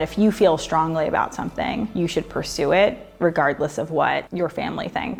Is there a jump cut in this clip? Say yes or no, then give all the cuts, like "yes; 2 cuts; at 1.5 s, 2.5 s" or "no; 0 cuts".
no; 0 cuts